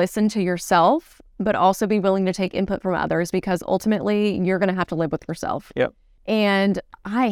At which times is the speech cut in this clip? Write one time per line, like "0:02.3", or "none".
0:06.1